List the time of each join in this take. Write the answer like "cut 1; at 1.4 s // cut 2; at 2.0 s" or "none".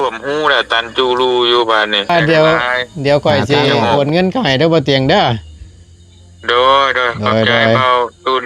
cut 1; at 2.1 s